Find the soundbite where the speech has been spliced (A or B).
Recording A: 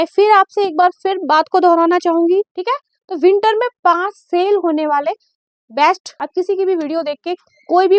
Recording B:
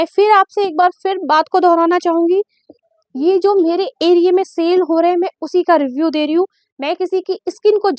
A